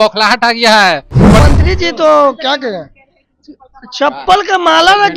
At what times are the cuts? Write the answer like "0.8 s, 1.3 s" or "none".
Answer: 1.4 s